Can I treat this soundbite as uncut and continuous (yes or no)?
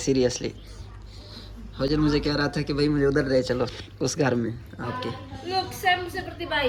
yes